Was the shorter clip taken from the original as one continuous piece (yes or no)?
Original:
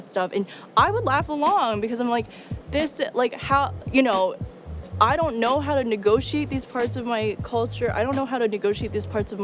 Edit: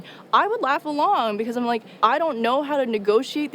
no